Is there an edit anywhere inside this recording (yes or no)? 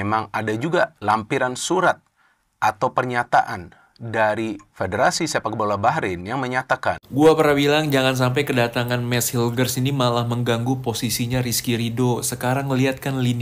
yes